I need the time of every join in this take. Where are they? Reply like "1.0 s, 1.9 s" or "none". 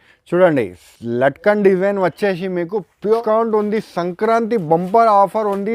3.2 s